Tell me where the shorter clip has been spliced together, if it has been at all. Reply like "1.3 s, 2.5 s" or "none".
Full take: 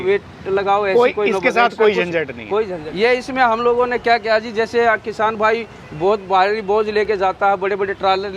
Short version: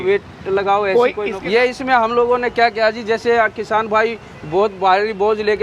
1.3 s

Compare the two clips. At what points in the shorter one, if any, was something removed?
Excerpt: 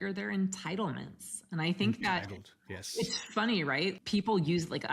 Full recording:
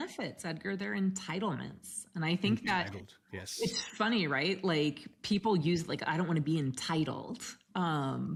4.0 s

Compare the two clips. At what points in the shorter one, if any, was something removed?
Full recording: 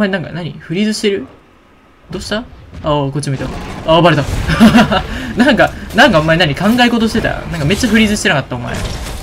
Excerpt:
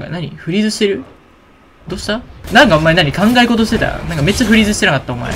2.4 s

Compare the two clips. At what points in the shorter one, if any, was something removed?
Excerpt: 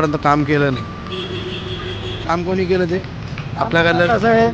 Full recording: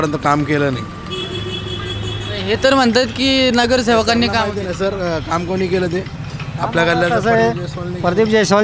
2.2 s

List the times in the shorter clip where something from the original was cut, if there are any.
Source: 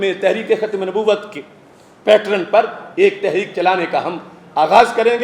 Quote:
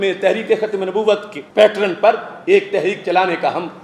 1.4 s

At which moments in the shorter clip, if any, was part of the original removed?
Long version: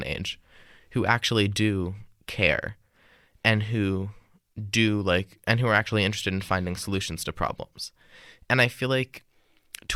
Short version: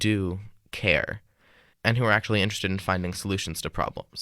1.7 s

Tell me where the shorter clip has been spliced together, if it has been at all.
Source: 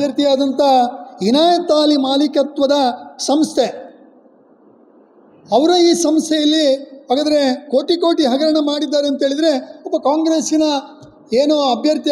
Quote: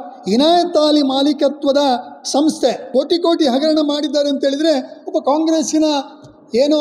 2.9 s

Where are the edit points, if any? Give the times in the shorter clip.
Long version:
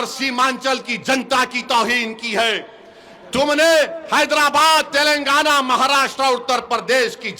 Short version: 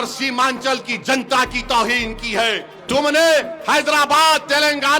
2.7 s

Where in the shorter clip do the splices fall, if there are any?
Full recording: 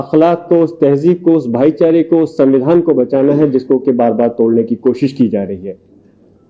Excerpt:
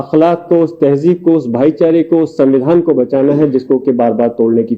none

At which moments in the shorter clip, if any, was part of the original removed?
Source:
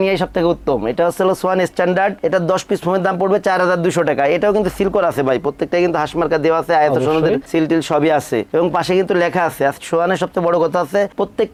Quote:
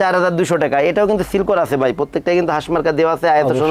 none

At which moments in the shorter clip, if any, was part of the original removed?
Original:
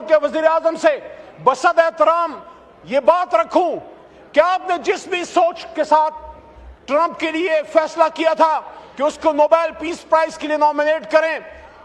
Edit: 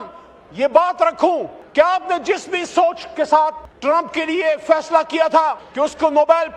1.6 s, 3.7 s, 5.6 s

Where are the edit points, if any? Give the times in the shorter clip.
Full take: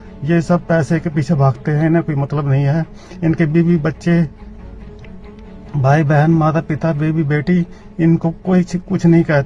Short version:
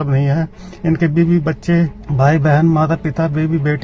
2.0 s

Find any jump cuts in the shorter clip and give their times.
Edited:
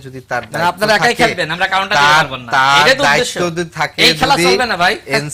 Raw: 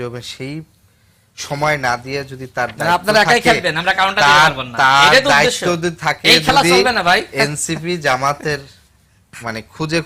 none

